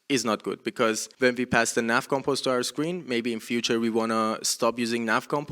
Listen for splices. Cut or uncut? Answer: cut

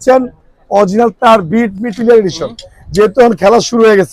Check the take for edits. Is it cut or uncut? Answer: cut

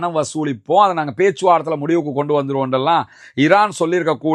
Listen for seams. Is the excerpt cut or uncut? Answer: uncut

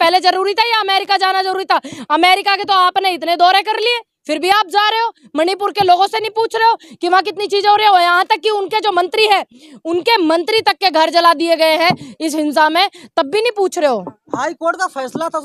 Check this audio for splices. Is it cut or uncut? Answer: uncut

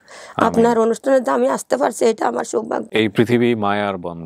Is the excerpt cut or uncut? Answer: cut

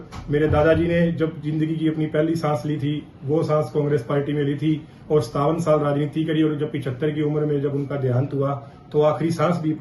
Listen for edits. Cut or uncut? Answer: uncut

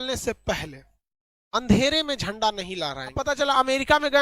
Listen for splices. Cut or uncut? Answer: cut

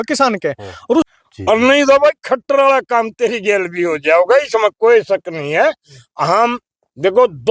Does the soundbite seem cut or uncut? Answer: cut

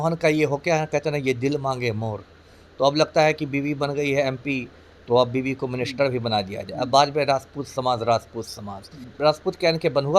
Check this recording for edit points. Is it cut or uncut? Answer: cut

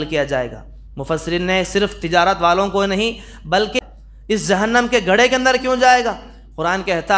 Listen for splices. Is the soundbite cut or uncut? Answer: cut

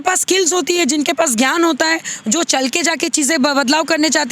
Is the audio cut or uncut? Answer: uncut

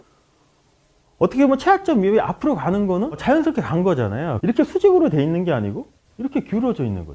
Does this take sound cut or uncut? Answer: cut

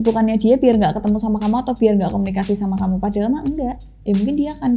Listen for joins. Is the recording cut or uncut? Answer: uncut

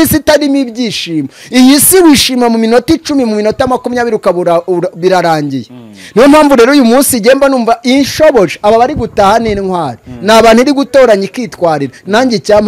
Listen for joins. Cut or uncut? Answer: uncut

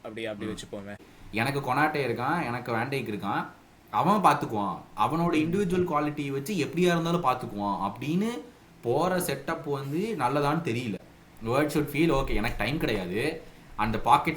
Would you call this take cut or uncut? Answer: cut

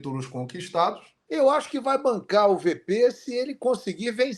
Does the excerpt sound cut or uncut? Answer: cut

